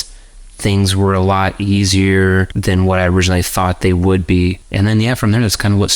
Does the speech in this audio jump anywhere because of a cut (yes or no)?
yes